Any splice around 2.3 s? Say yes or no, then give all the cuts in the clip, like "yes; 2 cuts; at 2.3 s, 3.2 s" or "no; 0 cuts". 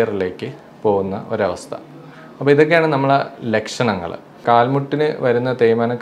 no; 1 cut; at 4.4 s